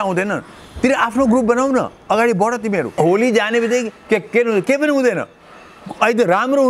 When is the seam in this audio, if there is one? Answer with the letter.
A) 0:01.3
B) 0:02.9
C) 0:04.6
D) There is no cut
B